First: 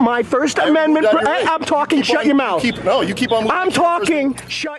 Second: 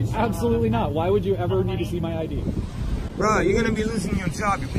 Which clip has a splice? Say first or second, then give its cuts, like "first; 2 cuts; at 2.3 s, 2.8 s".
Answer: second; 1 cut; at 2.4 s